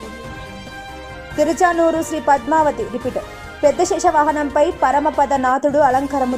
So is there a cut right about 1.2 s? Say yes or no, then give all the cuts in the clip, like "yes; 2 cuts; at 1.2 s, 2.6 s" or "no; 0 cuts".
yes; 1 cut; at 1.2 s